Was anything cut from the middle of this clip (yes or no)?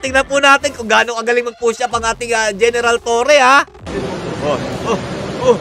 no